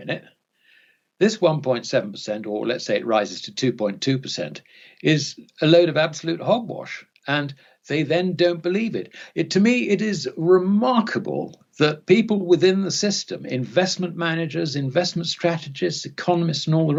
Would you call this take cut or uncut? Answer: uncut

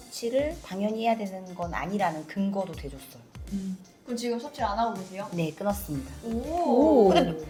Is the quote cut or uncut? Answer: uncut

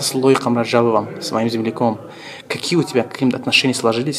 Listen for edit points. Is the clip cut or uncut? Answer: uncut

